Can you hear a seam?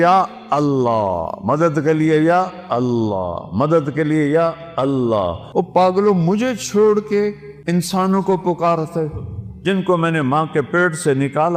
yes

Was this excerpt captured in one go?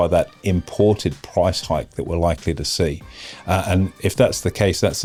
yes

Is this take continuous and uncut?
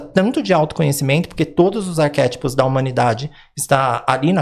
yes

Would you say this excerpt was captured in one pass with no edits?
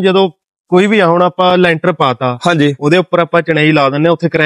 yes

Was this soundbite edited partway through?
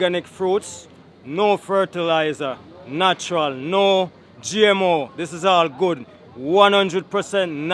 no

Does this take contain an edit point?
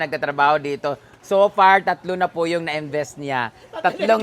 no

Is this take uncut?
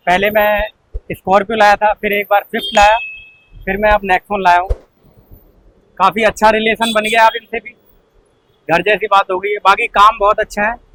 yes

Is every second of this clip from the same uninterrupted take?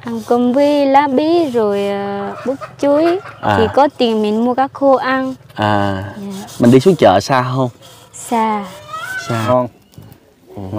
no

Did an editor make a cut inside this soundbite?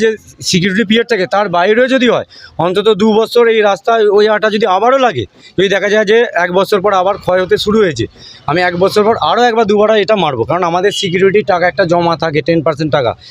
no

